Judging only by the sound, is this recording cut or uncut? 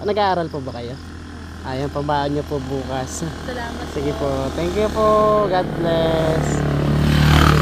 uncut